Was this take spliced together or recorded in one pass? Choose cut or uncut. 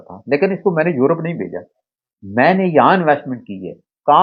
uncut